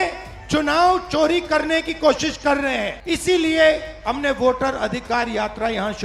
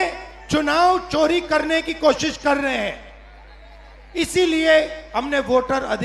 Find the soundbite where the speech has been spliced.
first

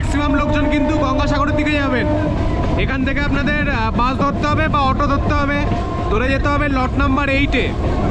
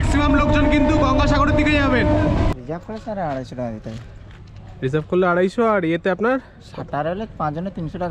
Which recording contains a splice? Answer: second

